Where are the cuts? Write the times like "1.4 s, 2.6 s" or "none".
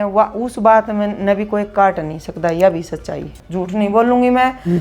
3.4 s